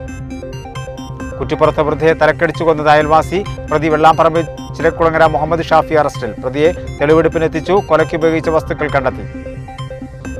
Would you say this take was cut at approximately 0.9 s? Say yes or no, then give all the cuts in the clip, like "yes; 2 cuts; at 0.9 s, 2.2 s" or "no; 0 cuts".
yes; 1 cut; at 0.9 s